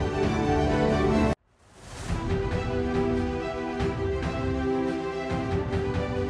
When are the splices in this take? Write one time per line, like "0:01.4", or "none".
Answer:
0:01.2